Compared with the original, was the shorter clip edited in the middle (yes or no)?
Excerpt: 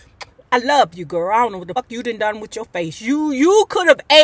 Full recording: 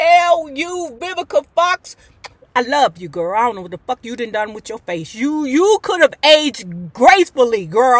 yes